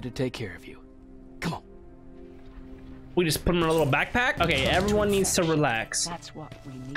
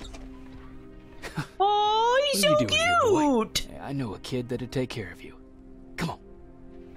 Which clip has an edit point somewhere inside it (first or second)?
first